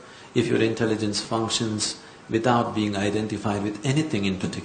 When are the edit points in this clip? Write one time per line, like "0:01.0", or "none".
0:03.3